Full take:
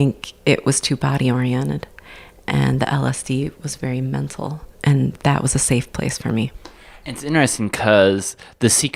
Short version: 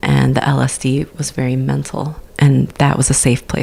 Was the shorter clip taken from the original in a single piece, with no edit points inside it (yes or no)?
yes